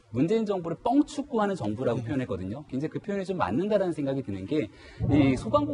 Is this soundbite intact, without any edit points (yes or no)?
yes